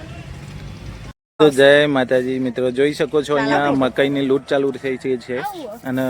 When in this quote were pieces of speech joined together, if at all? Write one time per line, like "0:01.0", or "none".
0:01.1